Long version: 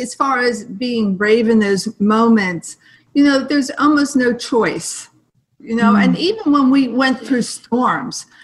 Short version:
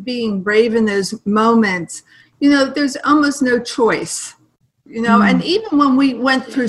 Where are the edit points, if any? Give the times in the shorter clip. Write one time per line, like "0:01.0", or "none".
none